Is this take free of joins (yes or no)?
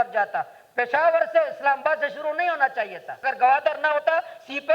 no